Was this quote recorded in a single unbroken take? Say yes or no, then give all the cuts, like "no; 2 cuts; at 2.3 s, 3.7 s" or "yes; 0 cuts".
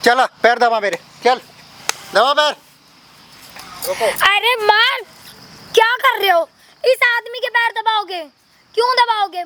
yes; 0 cuts